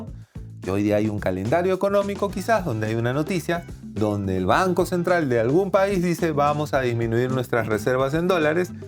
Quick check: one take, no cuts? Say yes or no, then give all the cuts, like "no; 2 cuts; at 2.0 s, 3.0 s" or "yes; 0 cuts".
yes; 0 cuts